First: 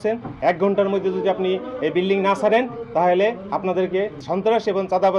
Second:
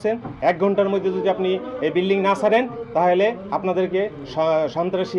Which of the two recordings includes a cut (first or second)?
first